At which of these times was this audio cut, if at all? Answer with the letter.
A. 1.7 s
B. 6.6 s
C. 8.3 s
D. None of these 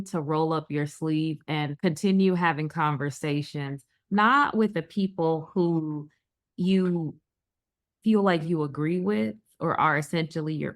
A